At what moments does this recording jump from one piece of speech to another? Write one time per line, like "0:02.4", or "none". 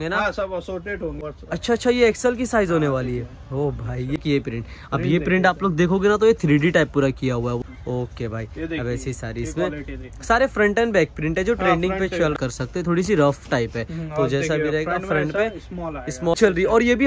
0:01.2
0:04.2
0:07.6
0:12.4
0:16.3